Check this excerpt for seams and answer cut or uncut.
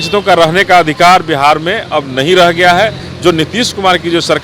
uncut